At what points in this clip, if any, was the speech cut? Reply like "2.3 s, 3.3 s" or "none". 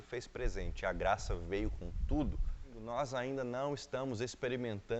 2.8 s